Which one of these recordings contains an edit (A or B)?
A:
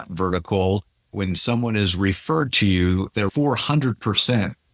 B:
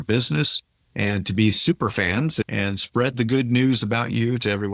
A